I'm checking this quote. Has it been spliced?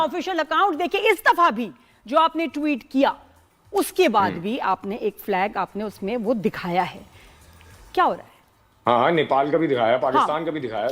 no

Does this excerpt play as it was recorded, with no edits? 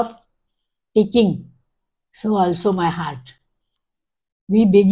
yes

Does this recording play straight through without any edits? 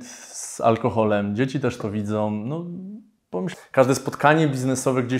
no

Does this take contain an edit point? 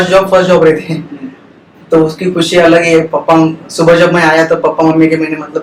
no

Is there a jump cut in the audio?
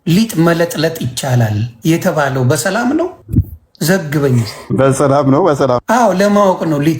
yes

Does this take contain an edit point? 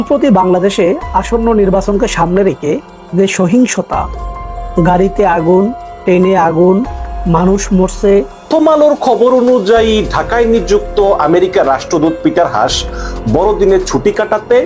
yes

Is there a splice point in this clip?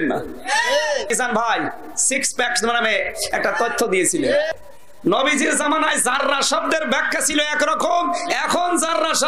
yes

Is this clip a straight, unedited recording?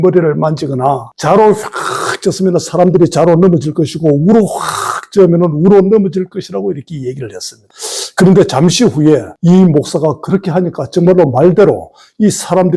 no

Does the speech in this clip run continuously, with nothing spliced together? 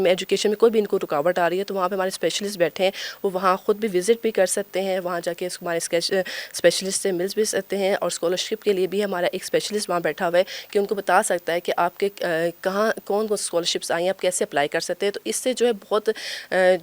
yes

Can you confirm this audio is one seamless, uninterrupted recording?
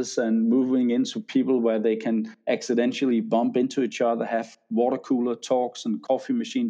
yes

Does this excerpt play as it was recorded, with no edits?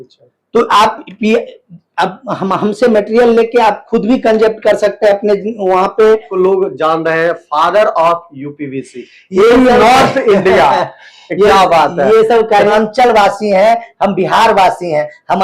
no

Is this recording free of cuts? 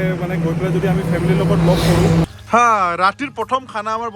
no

